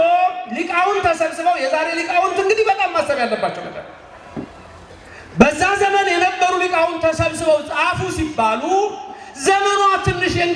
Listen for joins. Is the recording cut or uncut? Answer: uncut